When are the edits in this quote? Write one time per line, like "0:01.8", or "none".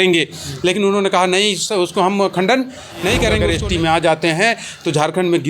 0:03.5